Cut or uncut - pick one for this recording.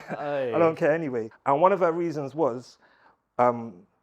cut